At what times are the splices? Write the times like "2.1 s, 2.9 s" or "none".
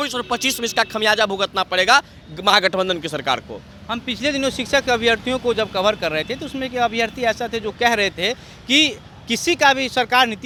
none